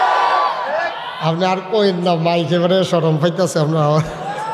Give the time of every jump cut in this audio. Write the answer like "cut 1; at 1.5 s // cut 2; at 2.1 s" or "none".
none

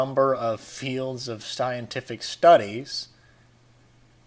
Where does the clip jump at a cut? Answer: cut 1; at 2.7 s

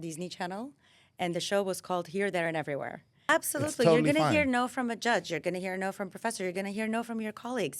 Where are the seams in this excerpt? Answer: cut 1; at 3.1 s

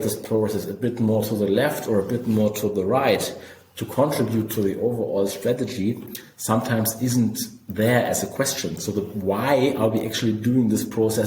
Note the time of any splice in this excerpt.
none

